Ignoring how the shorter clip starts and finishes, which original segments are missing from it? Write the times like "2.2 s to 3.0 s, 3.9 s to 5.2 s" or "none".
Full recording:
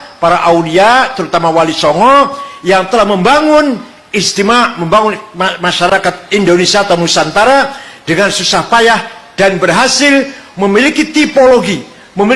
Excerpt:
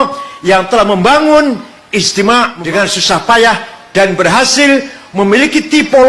4.8 s to 8.0 s